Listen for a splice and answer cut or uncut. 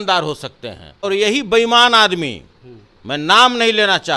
cut